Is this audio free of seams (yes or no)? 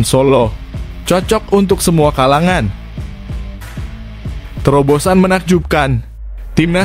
no